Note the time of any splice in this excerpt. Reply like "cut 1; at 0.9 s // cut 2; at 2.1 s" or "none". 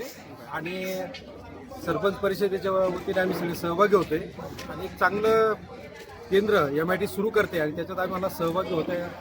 none